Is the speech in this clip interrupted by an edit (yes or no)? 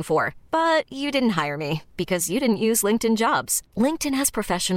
no